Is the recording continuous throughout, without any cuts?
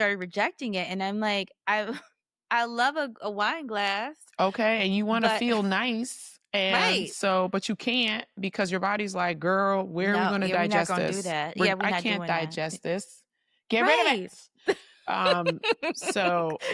yes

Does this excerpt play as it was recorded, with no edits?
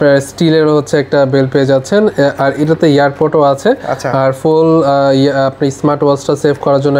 yes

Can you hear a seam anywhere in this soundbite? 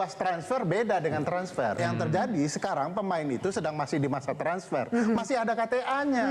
yes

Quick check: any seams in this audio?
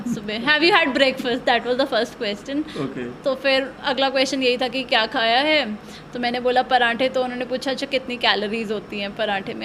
no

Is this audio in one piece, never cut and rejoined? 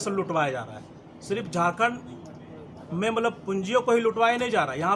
yes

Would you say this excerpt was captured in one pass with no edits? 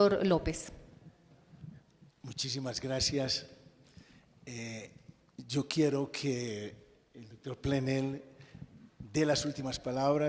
yes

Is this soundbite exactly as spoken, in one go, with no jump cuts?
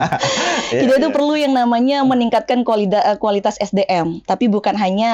yes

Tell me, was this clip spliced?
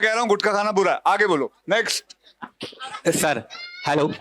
no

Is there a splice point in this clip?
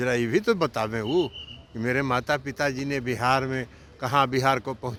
no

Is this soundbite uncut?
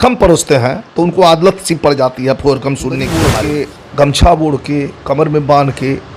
no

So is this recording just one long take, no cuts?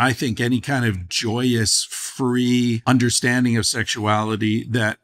no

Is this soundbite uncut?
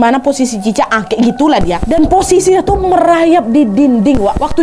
no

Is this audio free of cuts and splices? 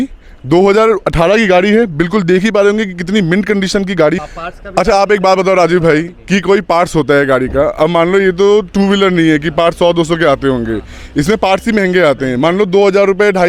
no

